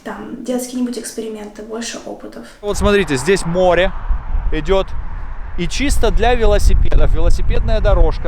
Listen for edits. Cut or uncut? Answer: cut